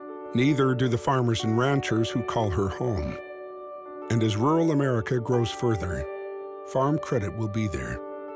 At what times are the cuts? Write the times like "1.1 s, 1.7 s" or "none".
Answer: none